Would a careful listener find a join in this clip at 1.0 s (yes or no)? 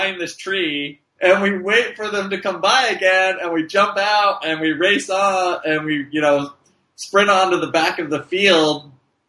yes